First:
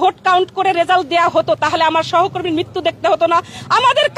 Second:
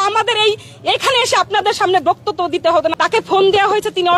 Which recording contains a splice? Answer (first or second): second